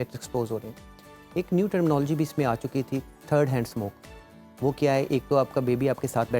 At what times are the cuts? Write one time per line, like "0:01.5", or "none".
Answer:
none